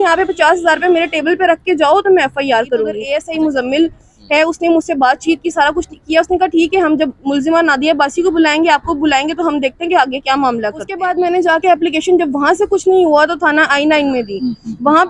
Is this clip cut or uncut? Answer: cut